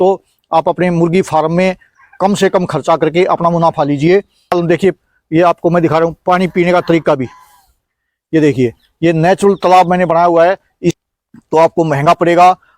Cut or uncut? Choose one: cut